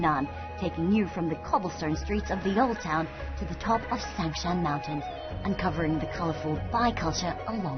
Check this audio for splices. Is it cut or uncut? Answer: uncut